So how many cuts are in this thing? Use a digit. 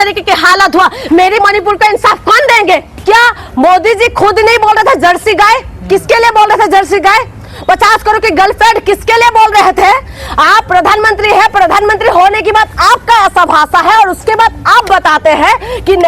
1